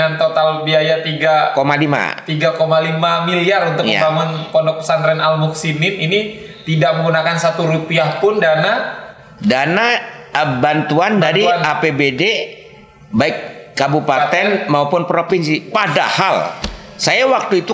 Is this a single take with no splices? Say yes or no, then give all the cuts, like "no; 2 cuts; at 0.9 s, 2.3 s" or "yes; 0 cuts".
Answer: yes; 0 cuts